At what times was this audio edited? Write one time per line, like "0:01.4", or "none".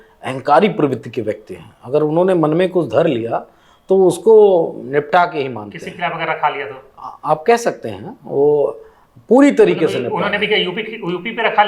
none